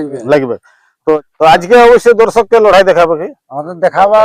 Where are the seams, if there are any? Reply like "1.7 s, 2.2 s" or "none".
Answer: 1.2 s